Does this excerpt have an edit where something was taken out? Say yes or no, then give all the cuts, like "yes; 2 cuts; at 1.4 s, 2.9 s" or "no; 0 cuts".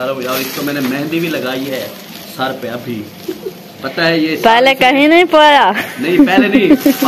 no; 0 cuts